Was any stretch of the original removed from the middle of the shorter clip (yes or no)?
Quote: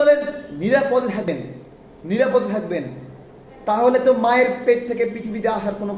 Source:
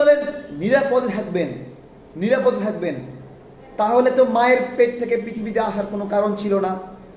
yes